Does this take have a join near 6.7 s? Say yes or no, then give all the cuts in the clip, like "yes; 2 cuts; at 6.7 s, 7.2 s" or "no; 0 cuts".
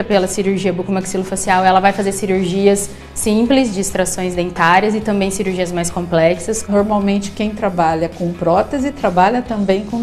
yes; 1 cut; at 6.7 s